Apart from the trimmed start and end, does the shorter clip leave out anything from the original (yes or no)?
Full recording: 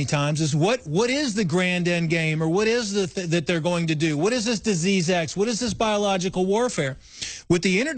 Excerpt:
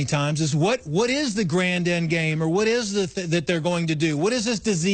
no